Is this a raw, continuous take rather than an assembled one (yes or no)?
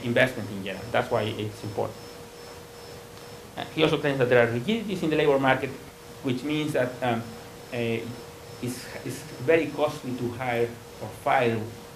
yes